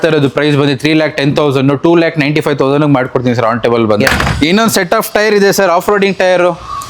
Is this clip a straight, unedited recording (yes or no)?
no